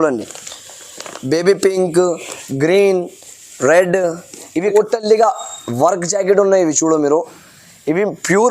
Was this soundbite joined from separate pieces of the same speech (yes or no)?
yes